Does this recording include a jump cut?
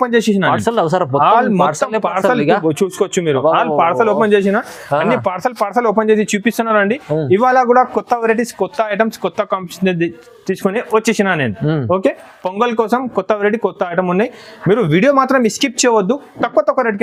no; 0 cuts

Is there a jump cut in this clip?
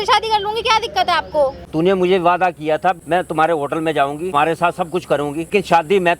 yes; 4 cuts; at 1.6 s, 3.0 s, 4.3 s, 5.5 s

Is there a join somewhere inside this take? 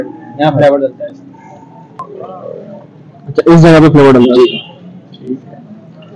yes; 1 cut; at 2.1 s

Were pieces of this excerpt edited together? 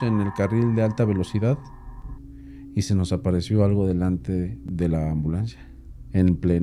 yes; 1 cut; at 4.6 s

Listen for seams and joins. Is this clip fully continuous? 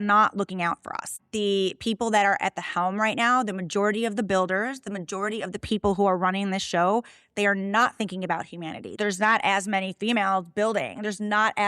no; 2 cuts; at 1.2 s, 9.0 s

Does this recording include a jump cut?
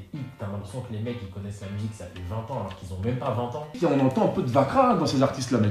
yes; 1 cut; at 3.8 s

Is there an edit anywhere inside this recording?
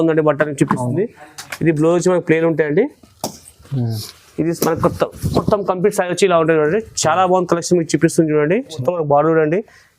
yes; 1 cut; at 8.8 s

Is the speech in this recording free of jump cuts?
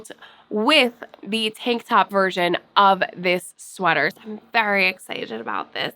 no; 1 cut; at 4.1 s

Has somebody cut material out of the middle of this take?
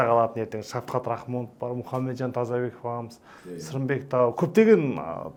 no; 0 cuts

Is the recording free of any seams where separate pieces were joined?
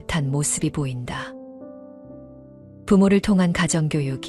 yes; 0 cuts

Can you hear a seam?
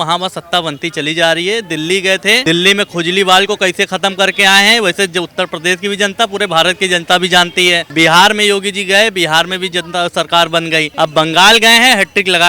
yes; 3 cuts; at 2.4 s, 7.9 s, 10.9 s

